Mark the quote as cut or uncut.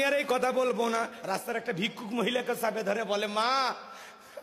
cut